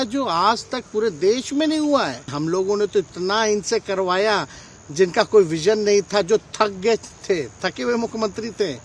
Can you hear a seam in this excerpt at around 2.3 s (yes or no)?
yes